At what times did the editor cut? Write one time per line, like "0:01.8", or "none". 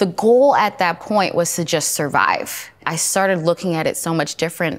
0:02.9